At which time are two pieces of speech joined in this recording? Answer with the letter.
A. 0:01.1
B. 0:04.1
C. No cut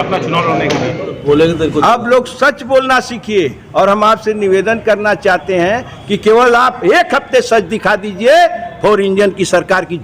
A